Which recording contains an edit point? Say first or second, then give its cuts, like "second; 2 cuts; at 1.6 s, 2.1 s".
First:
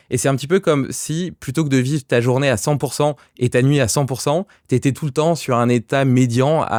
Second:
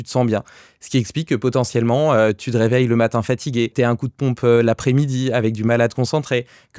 second; 1 cut; at 3.7 s